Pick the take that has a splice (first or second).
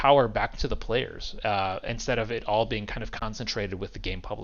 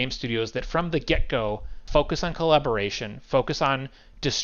second